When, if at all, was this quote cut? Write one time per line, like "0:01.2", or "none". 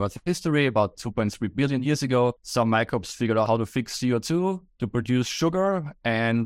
0:02.4
0:03.5
0:04.7